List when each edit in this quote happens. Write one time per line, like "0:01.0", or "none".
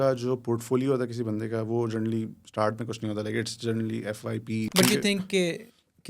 0:04.7